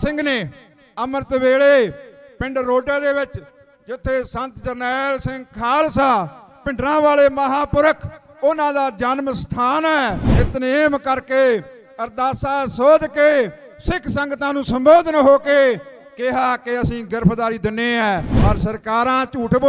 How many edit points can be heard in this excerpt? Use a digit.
2